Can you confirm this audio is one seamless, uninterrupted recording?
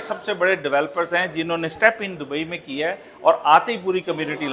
yes; 0 cuts

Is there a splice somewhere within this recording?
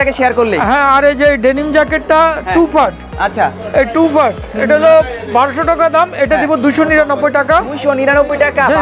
no; 0 cuts

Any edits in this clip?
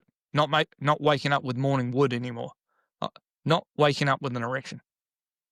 no; 0 cuts

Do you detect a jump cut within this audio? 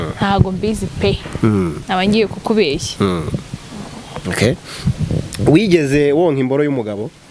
no; 0 cuts

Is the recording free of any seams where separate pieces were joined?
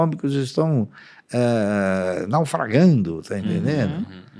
yes; 0 cuts

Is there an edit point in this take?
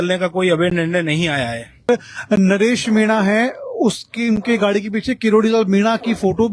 yes; 1 cut; at 1.9 s

